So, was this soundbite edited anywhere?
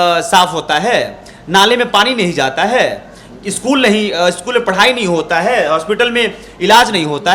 no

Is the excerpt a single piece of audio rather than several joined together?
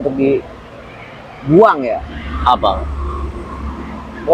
yes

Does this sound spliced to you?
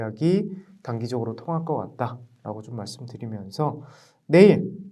no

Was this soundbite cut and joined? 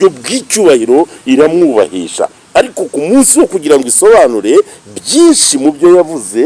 no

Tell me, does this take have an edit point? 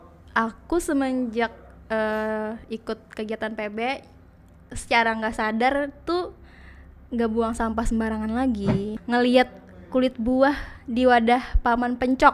yes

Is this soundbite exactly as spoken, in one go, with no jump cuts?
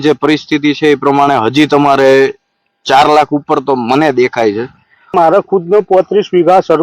no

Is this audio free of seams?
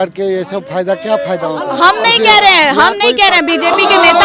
yes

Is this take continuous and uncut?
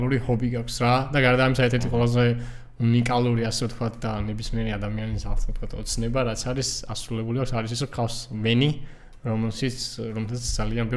yes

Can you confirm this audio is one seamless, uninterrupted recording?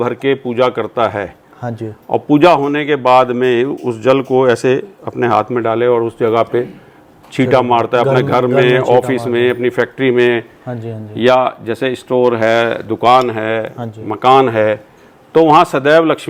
yes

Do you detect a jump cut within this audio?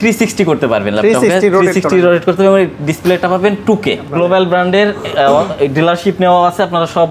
yes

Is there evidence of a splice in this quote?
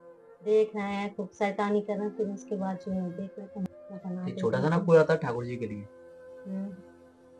yes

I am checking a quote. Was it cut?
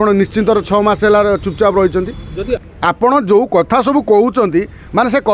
yes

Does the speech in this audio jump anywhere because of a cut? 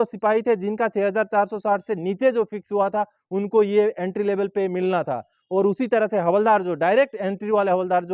no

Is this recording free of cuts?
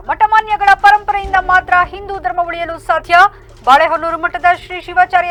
yes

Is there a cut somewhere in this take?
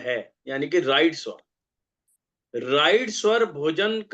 no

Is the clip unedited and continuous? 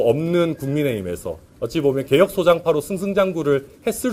yes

